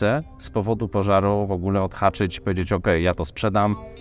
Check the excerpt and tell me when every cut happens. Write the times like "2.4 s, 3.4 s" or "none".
none